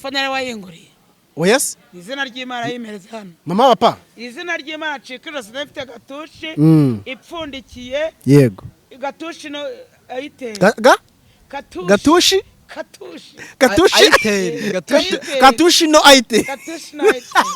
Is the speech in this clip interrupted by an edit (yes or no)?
no